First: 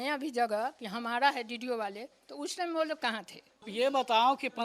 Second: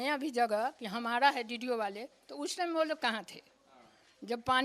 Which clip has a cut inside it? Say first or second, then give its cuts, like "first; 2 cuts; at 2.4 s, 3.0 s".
first; 1 cut; at 3.7 s